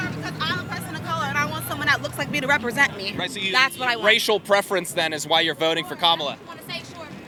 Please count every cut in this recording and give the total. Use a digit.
0